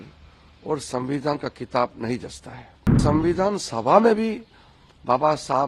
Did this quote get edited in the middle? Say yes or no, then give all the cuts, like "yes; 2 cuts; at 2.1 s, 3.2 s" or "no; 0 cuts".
yes; 1 cut; at 3.0 s